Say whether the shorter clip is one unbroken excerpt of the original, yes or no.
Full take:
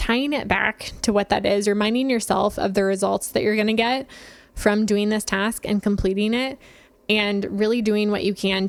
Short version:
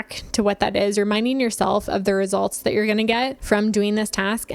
no